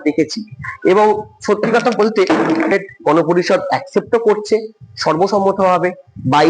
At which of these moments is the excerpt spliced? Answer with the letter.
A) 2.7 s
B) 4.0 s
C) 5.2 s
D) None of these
A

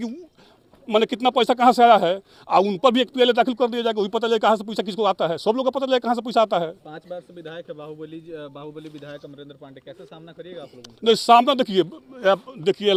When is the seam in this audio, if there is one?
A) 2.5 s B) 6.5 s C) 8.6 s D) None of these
D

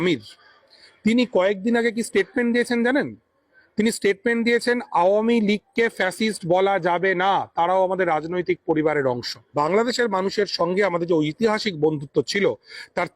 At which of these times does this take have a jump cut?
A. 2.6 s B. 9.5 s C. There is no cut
B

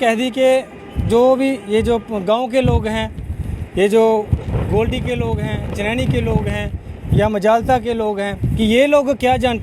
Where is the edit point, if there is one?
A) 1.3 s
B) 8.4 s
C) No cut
B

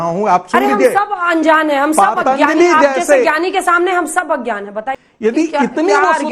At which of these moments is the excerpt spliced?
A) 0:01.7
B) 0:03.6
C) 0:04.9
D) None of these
C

